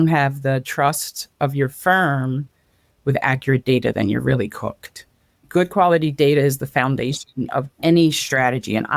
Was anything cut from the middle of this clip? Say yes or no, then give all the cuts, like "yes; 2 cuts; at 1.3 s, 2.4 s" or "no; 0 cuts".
yes; 1 cut; at 5.4 s